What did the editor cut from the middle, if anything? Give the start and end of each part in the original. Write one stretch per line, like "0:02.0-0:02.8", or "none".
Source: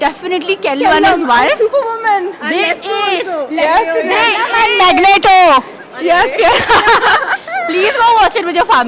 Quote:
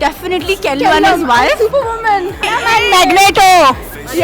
0:02.4-0:04.3